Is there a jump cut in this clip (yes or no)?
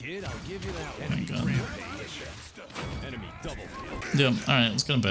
yes